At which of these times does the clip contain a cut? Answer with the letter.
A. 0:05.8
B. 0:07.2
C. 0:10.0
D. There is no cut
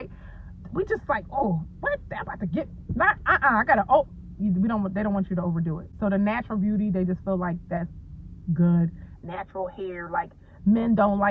D